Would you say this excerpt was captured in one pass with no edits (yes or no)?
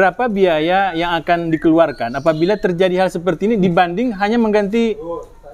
yes